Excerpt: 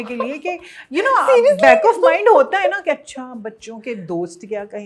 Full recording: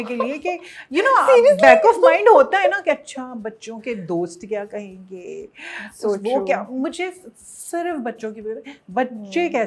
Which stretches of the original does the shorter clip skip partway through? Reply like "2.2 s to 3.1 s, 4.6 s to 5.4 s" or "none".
none